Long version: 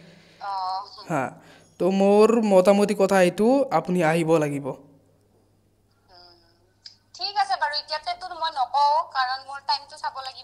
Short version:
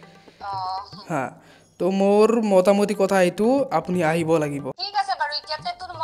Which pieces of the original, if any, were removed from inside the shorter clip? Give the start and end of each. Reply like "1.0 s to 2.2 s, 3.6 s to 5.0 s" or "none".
4.8 s to 7.2 s

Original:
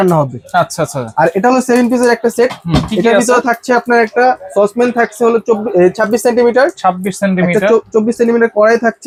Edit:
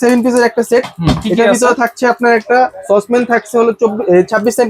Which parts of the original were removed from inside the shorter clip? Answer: none

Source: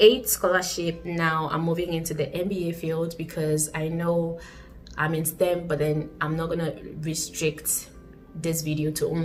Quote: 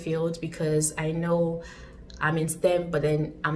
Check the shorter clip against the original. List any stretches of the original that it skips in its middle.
none

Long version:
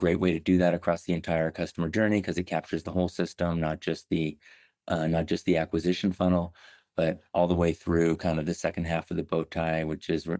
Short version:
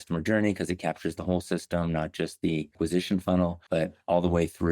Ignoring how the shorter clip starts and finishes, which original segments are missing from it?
4.4 s to 5.7 s, 6.5 s to 6.9 s

